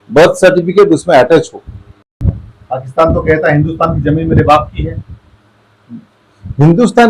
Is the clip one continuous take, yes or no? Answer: no